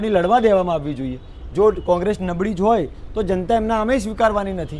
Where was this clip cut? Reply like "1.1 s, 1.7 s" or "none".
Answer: none